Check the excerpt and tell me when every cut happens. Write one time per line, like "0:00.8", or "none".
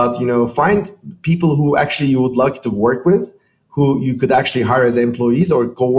none